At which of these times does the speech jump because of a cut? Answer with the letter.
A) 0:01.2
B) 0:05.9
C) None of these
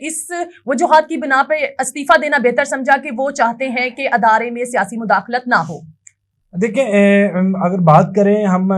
C